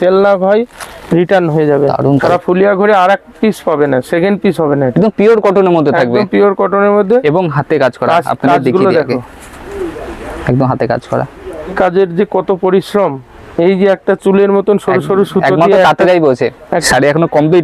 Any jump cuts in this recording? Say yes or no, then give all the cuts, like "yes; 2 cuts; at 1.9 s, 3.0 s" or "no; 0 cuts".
yes; 3 cuts; at 2.2 s, 11.7 s, 16.8 s